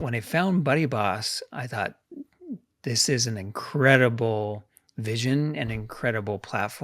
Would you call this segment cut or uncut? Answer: uncut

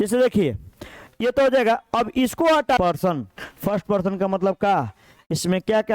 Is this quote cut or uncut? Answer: cut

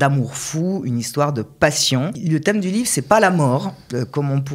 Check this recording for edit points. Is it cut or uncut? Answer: cut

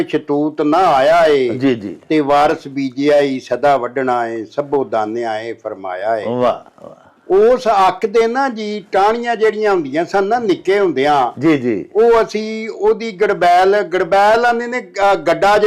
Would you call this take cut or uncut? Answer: uncut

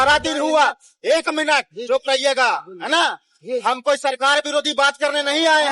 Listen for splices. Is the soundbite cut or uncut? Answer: uncut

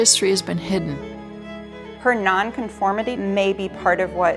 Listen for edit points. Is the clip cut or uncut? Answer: cut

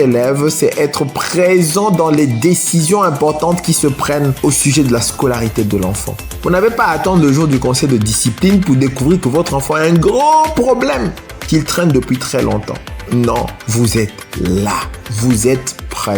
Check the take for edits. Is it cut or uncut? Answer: uncut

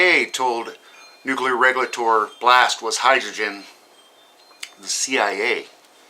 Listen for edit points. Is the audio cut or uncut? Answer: cut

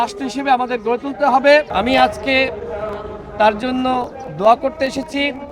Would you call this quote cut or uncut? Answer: cut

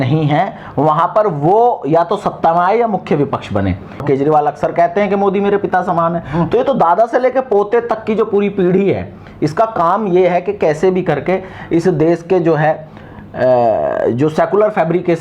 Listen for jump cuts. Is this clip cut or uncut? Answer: cut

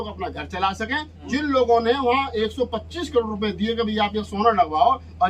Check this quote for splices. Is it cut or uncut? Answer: cut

